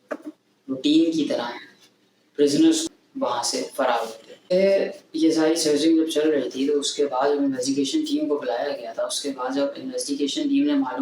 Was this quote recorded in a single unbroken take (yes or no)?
no